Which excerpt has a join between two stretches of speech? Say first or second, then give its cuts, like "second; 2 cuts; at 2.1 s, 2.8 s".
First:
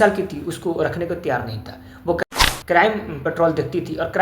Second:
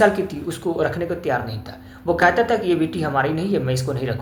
first; 1 cut; at 2.2 s